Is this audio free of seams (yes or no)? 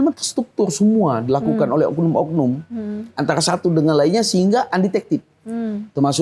yes